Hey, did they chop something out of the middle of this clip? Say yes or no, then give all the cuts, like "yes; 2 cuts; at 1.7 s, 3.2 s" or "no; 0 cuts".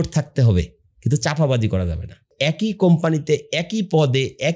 yes; 1 cut; at 2.3 s